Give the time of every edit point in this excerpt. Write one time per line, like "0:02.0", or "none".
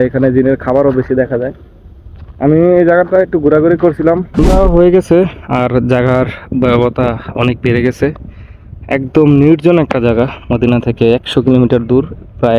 0:04.3

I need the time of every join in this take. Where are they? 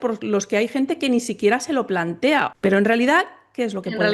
0:02.5

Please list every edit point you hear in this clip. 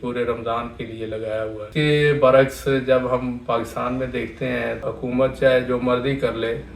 0:01.7
0:04.8

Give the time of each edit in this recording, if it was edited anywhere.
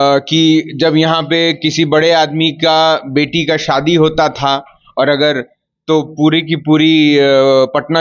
none

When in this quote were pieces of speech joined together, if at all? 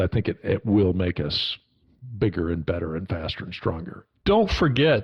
0:04.0

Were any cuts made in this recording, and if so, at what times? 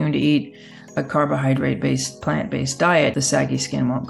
0:03.2

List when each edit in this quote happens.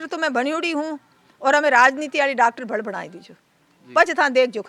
none

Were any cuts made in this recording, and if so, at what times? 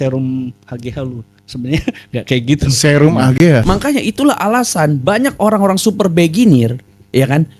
0:03.6

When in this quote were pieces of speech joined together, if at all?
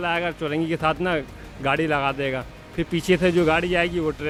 none

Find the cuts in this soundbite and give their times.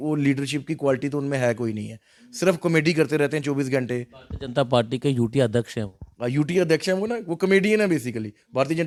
none

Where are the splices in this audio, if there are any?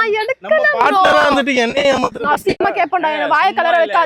none

